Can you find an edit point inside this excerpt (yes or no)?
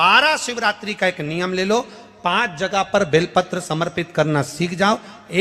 no